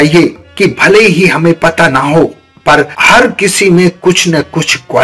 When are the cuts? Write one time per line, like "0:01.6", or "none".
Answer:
none